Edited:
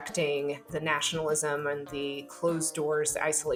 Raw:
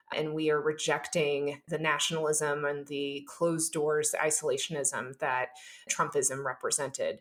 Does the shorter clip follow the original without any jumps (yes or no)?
yes